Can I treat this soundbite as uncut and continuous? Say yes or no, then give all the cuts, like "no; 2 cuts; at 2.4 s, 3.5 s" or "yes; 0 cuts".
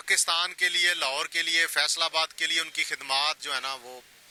yes; 0 cuts